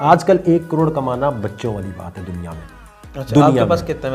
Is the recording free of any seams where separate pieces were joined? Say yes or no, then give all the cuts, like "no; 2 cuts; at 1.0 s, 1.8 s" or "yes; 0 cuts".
yes; 0 cuts